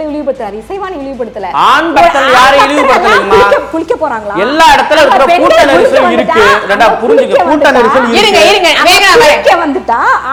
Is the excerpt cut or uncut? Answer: uncut